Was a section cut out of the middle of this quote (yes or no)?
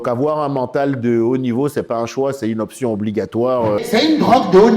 yes